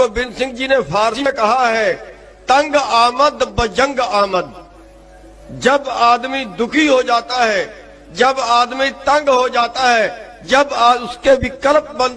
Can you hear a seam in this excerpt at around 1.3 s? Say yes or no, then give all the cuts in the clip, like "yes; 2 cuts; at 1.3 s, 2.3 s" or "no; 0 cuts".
yes; 1 cut; at 1.3 s